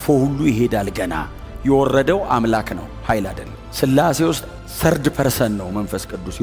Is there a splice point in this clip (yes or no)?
no